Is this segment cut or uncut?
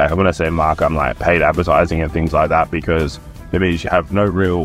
uncut